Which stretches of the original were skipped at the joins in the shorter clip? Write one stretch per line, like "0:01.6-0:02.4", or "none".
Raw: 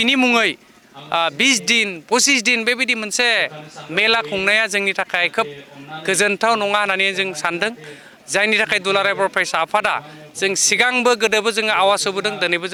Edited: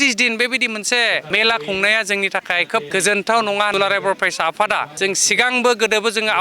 0:03.5-0:03.9
0:05.5-0:06.0
0:06.9-0:08.9
0:10.0-0:10.3